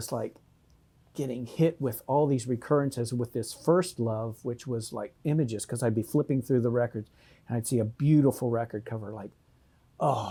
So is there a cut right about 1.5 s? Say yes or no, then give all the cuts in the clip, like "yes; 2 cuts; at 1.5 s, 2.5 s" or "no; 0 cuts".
no; 0 cuts